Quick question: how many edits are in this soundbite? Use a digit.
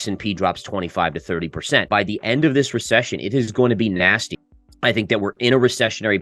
2